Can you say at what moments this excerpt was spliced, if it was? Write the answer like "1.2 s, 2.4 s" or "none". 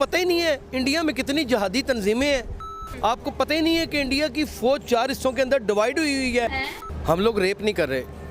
2.5 s, 6.6 s